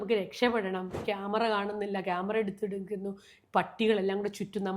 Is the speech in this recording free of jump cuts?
no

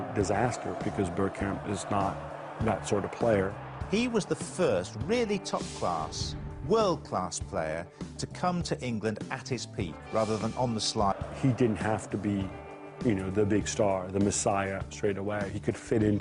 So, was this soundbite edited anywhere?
no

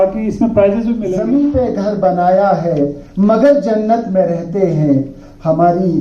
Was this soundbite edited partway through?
yes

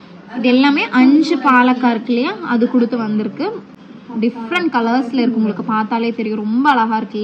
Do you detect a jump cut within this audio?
no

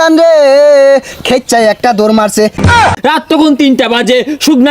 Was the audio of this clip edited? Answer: yes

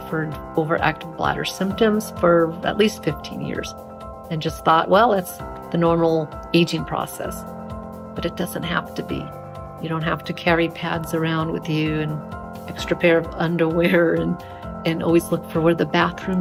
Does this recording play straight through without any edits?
yes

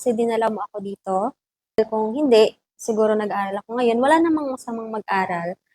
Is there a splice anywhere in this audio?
yes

